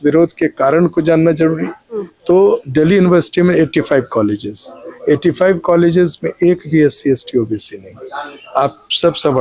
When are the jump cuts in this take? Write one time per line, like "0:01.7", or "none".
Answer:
0:02.1